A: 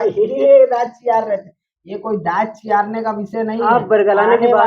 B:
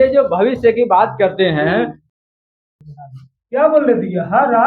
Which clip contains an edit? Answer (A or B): B